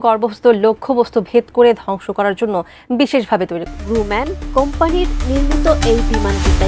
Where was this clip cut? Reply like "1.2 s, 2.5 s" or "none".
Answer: 3.7 s